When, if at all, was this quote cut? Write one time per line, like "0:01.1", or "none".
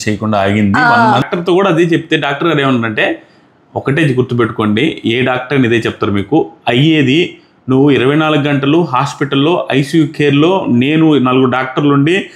0:01.3